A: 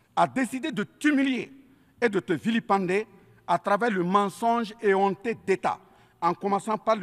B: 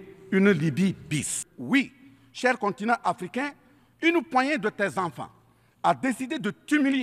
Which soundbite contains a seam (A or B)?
B